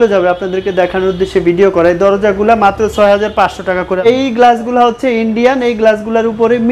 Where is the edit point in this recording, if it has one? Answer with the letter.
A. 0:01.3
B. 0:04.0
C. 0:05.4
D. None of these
B